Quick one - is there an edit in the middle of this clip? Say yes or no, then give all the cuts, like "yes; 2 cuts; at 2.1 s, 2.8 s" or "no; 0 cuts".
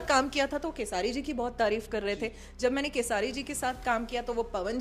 no; 0 cuts